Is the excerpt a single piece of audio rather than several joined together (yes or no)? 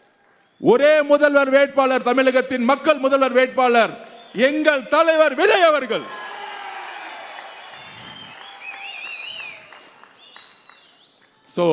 yes